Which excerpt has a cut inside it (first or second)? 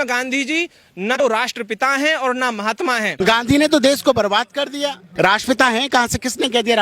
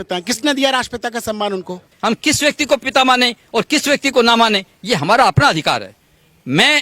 first